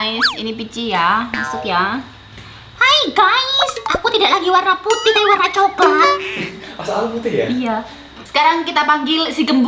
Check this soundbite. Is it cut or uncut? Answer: uncut